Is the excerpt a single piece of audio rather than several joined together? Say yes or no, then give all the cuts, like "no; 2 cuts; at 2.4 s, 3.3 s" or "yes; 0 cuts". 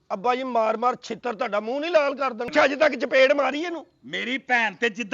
no; 1 cut; at 2.5 s